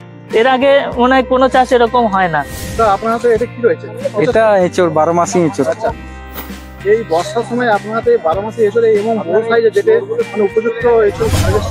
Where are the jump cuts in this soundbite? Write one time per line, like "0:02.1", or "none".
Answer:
0:02.5